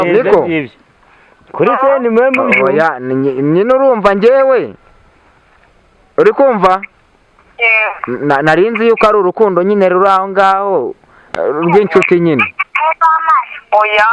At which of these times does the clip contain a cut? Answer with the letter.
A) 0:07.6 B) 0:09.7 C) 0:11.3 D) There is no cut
D